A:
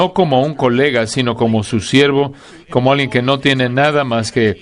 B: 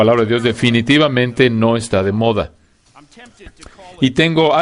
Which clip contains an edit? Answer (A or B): A